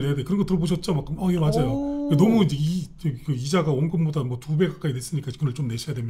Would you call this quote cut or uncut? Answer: uncut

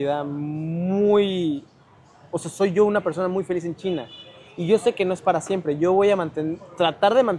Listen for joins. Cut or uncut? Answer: uncut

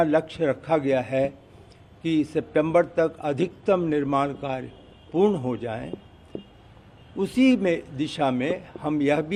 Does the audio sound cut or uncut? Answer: uncut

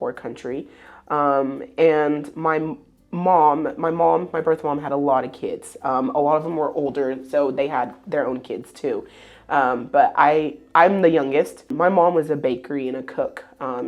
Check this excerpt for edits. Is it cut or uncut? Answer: cut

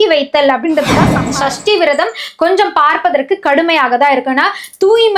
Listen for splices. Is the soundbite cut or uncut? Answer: cut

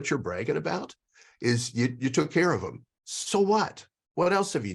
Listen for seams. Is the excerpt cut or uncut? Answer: uncut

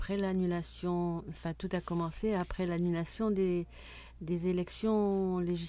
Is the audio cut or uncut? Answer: cut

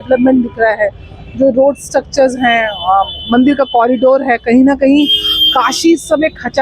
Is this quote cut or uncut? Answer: uncut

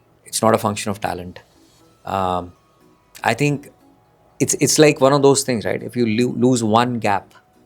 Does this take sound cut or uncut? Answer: uncut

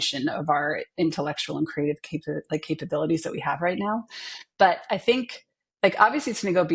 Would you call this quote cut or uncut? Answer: uncut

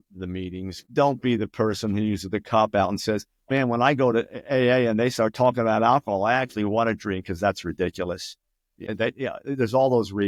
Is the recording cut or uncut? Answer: uncut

